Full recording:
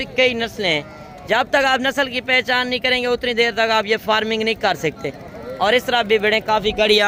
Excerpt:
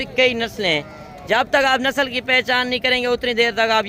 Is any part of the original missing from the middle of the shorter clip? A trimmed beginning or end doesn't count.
no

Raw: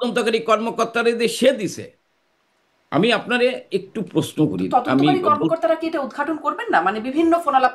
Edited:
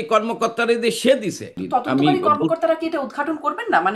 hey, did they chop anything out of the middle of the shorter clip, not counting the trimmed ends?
yes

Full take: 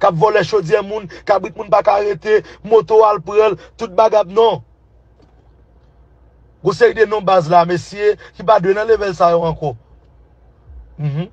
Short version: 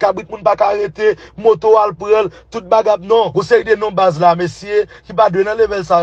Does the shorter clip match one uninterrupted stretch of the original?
no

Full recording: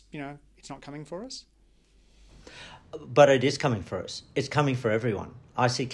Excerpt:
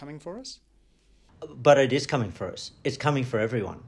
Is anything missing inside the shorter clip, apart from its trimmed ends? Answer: yes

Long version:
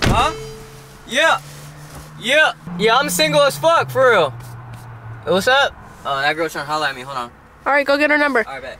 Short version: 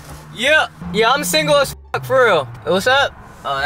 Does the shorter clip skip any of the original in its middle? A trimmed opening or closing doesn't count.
yes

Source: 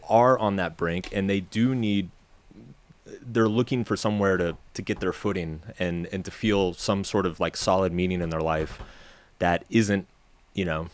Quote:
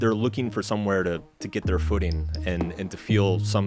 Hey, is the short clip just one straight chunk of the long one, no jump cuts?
yes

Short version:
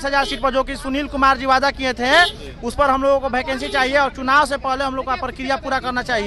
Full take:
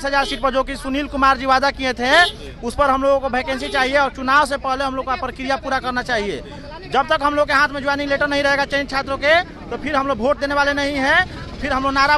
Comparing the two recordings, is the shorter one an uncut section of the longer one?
yes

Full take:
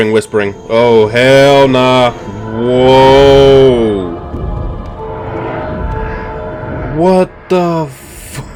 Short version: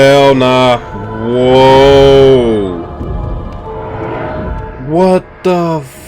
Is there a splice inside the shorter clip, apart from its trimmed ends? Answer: yes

